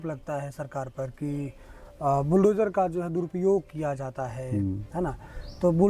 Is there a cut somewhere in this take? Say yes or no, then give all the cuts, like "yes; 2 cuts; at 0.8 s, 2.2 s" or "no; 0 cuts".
no; 0 cuts